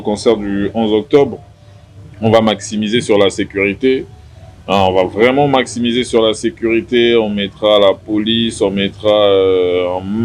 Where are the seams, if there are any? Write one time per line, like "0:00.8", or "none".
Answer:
none